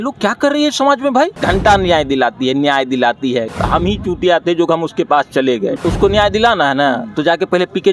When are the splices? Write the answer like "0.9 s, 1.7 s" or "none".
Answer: 1.4 s, 3.5 s, 5.8 s